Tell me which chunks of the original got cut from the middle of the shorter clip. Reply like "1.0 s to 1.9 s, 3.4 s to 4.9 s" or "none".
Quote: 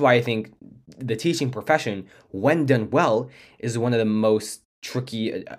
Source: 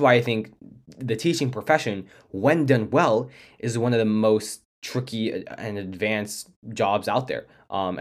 none